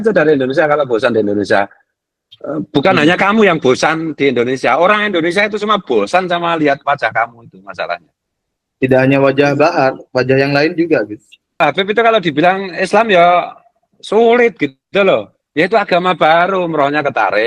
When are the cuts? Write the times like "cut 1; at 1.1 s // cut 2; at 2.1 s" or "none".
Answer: cut 1; at 11.5 s